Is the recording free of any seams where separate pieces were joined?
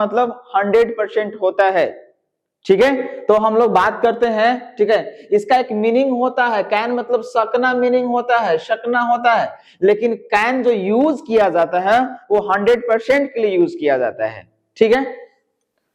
yes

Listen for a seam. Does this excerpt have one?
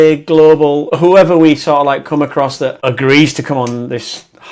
yes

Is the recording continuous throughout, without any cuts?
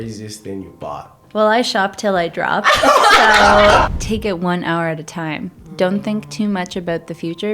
no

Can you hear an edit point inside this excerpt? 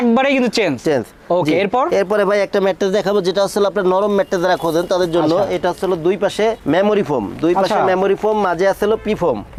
no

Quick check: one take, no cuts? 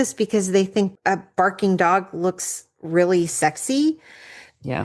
no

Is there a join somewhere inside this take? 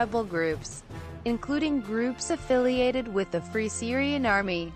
yes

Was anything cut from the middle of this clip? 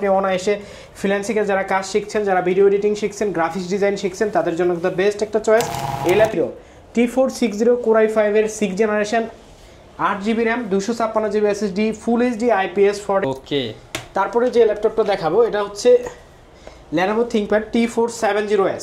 yes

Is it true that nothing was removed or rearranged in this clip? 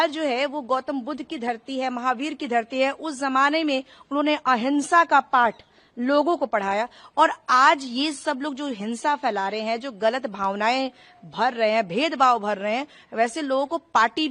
yes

